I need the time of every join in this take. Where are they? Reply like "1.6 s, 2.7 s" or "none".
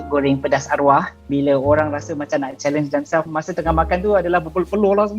1.2 s, 3.3 s